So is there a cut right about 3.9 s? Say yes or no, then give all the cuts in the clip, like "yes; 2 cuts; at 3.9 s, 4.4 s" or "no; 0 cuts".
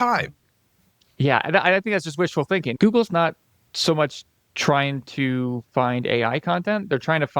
no; 1 cut; at 2.7 s